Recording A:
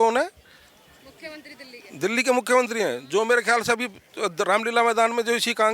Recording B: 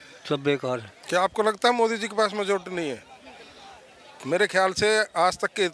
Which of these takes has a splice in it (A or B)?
B